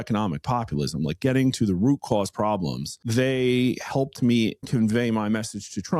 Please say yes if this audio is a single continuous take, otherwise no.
no